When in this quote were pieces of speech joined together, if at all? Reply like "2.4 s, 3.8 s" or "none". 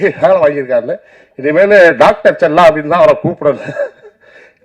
none